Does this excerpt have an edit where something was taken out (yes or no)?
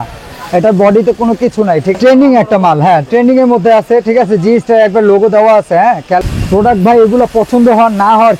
yes